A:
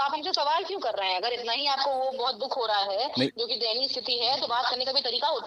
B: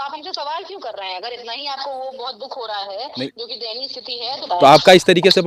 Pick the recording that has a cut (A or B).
B